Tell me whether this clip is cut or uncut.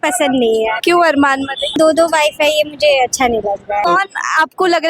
cut